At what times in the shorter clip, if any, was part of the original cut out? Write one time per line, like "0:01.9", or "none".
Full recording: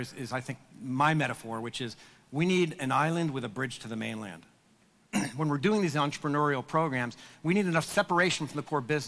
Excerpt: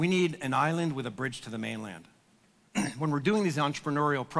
none